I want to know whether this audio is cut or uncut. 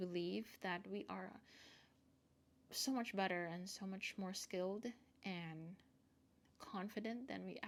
uncut